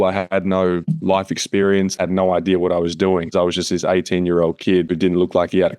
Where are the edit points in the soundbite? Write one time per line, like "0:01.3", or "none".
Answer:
0:01.9
0:03.3
0:04.9